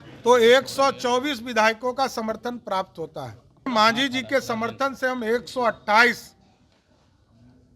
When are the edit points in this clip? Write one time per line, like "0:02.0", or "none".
0:03.7